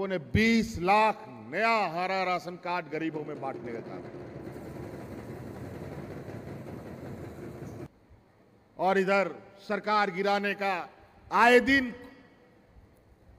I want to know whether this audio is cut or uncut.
cut